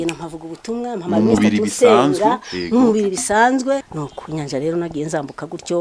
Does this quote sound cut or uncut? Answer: cut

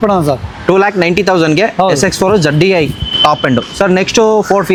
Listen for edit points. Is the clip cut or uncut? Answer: uncut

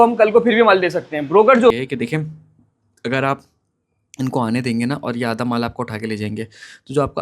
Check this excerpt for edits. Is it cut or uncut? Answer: cut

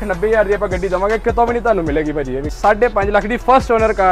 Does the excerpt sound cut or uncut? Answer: cut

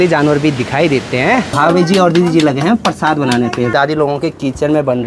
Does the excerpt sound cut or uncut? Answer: cut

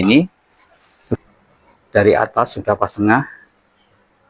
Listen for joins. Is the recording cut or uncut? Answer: cut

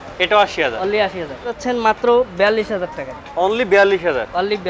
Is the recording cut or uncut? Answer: cut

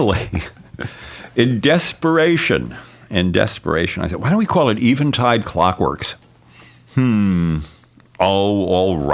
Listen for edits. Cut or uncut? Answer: uncut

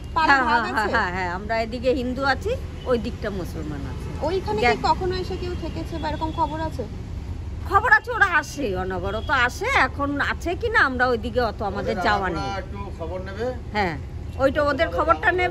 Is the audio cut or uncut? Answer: uncut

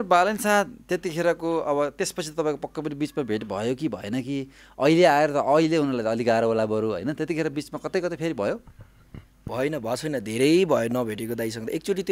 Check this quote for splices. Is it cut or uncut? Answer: uncut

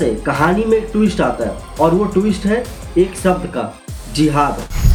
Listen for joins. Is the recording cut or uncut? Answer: uncut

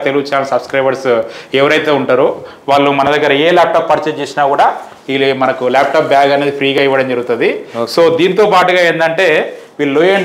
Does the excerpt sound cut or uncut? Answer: uncut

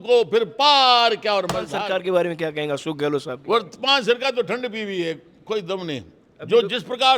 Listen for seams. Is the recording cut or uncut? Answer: cut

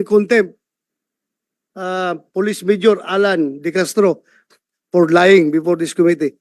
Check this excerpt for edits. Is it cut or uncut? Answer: uncut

